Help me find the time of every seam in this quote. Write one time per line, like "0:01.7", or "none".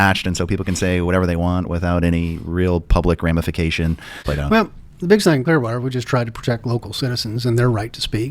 0:04.2